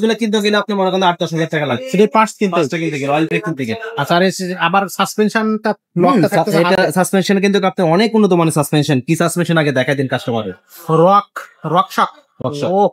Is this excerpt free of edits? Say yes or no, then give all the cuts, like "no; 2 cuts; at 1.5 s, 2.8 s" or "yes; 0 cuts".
yes; 0 cuts